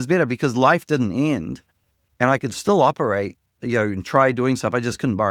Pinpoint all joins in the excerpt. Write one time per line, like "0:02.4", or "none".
none